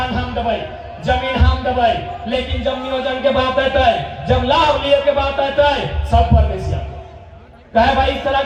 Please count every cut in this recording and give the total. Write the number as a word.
zero